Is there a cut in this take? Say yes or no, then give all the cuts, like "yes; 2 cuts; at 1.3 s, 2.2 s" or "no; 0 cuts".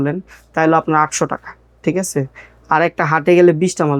no; 0 cuts